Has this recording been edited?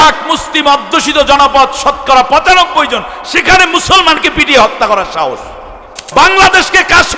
yes; 1 cut; at 6.0 s

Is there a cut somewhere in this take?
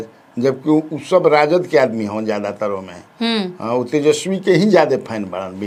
no; 0 cuts

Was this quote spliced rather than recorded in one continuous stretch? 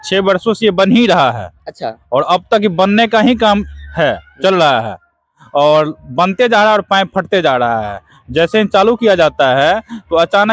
no; 0 cuts

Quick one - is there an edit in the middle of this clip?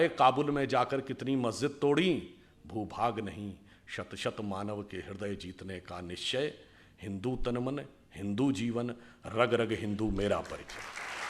no; 0 cuts

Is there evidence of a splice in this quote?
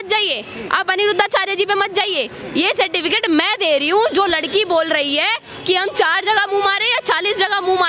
no; 0 cuts

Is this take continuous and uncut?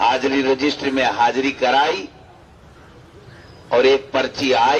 yes; 0 cuts

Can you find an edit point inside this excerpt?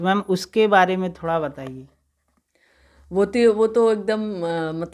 no; 0 cuts

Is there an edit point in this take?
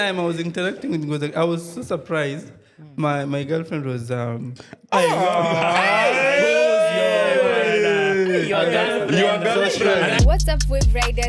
yes; 1 cut; at 10.2 s

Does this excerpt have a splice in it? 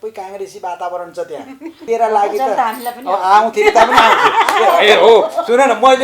yes; 1 cut; at 1.8 s

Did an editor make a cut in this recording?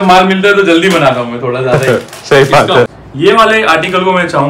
yes; 1 cut; at 2.9 s

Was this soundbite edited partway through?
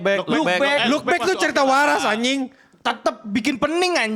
no; 0 cuts

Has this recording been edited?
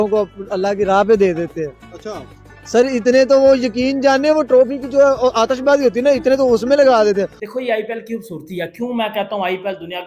yes; 1 cut; at 7.4 s

